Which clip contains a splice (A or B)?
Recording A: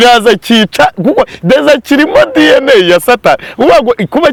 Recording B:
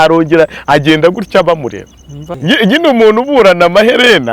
B